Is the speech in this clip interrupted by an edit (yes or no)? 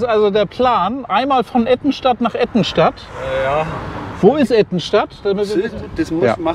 yes